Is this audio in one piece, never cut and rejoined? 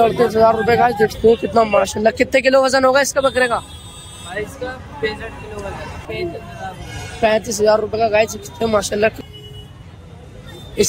no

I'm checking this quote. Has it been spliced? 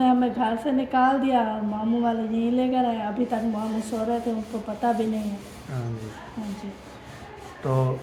no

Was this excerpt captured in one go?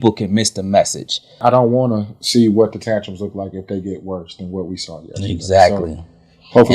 no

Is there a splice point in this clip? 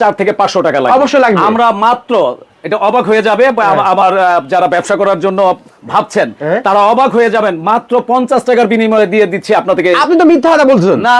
no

